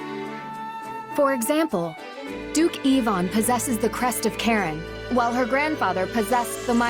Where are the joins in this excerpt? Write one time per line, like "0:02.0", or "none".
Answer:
0:01.2